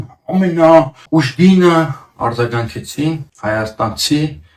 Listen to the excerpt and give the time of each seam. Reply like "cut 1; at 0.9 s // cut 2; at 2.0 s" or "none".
cut 1; at 1.0 s // cut 2; at 3.3 s

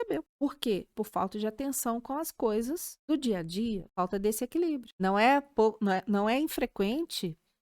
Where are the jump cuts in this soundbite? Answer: cut 1; at 0.9 s // cut 2; at 2.9 s // cut 3; at 3.9 s // cut 4; at 4.9 s

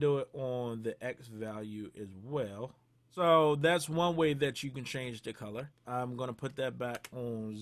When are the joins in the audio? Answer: cut 1; at 3.0 s // cut 2; at 5.8 s

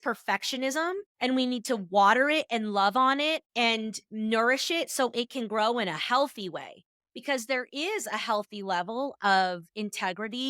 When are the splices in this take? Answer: cut 1; at 1.1 s

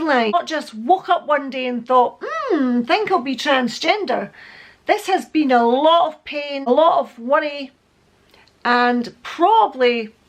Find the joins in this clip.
none

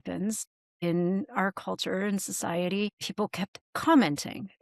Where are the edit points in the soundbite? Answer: none

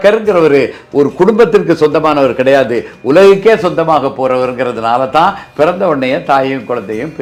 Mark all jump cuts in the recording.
none

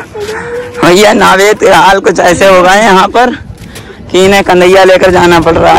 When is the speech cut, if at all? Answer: none

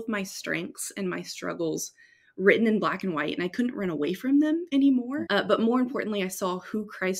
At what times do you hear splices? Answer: cut 1; at 5.2 s

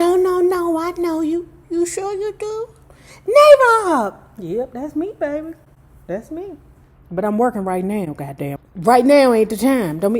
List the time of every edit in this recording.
cut 1; at 8.6 s

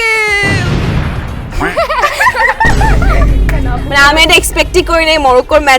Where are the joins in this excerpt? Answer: none

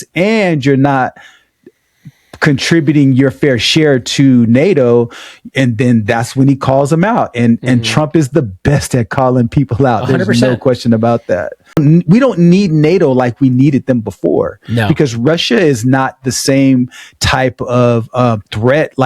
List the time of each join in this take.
cut 1; at 11.8 s

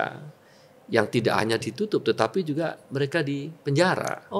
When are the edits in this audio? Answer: none

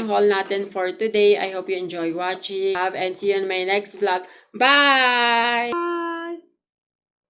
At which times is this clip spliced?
cut 1; at 2.8 s // cut 2; at 5.7 s

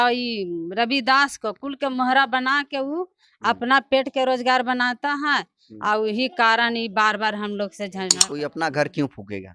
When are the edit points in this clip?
cut 1; at 8.2 s

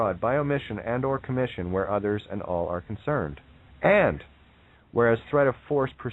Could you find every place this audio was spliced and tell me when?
cut 1; at 5.1 s

